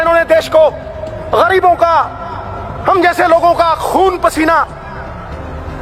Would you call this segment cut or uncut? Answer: uncut